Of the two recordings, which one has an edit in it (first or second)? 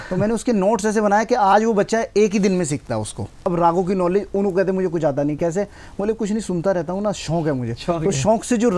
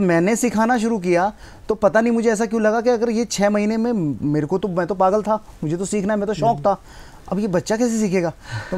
first